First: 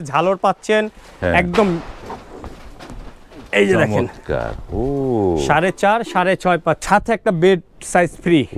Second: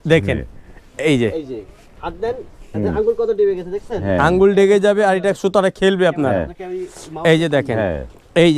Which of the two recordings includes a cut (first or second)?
first